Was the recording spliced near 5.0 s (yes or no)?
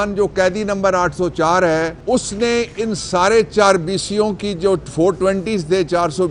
no